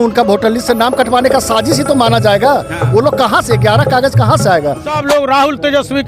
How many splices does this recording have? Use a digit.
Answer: 1